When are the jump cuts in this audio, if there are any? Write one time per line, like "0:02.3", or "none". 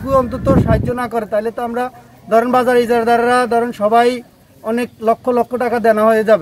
none